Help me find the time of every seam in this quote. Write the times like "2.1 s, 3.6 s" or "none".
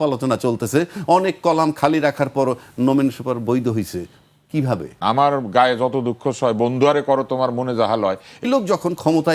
4.9 s, 8.4 s